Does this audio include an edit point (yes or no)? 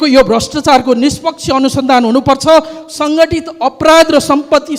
no